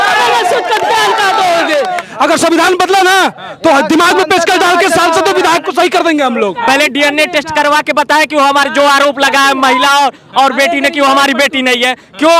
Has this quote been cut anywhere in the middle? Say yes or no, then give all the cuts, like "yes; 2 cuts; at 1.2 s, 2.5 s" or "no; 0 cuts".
yes; 2 cuts; at 2.0 s, 6.6 s